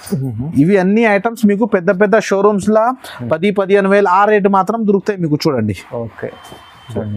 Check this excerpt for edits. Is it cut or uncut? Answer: uncut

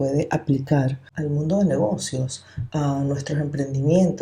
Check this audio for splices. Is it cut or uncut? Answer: cut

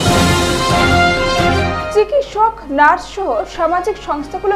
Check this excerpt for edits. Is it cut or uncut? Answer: uncut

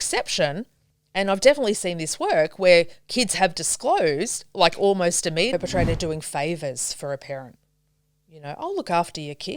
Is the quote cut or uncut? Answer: cut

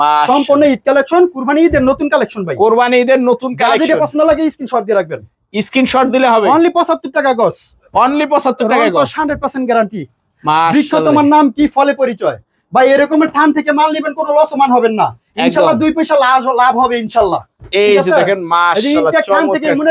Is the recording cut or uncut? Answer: uncut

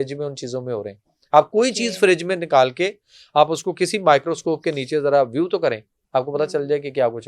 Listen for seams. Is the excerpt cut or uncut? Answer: uncut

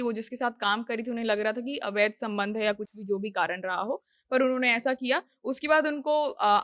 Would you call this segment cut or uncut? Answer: uncut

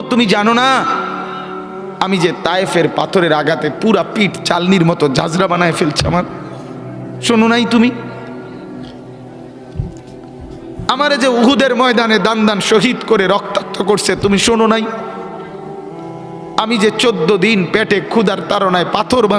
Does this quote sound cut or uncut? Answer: uncut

